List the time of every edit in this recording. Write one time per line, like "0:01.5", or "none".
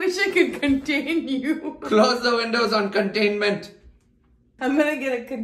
0:04.5